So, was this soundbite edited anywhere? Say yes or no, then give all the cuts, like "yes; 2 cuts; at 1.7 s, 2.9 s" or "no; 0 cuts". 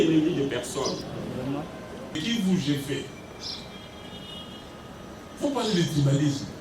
yes; 1 cut; at 2.2 s